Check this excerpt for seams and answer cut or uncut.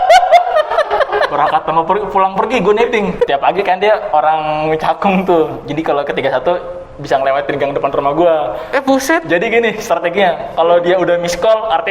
cut